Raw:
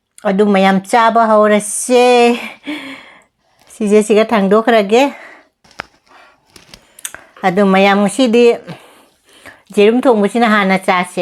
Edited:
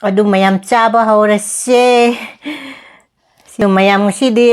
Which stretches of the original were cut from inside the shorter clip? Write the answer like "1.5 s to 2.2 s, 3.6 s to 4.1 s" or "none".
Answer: 3.8 s to 7.6 s